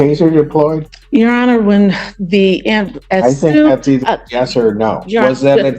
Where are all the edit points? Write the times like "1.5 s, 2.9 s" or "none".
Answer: 0.9 s